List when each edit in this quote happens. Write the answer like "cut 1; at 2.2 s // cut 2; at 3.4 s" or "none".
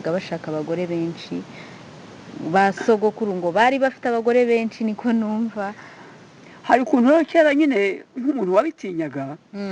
none